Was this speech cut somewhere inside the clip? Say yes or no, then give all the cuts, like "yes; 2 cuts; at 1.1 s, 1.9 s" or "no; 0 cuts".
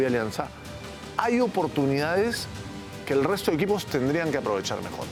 no; 0 cuts